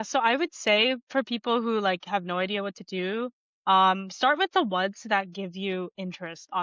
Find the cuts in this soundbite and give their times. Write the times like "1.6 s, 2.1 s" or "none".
none